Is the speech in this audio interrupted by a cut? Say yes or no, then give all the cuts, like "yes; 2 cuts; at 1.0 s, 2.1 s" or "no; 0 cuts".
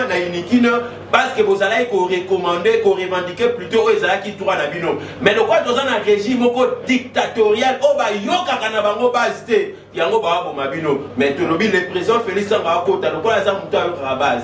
no; 0 cuts